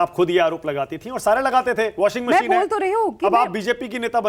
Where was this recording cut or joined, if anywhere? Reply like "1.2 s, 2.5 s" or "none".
none